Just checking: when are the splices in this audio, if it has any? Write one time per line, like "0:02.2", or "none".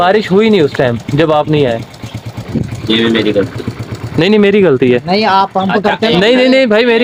none